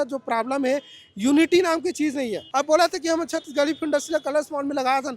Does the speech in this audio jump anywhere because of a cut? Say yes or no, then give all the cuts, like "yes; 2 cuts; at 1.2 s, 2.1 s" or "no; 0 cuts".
yes; 1 cut; at 2.4 s